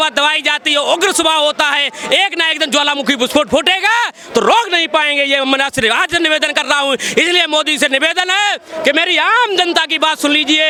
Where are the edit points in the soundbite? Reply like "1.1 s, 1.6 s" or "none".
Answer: none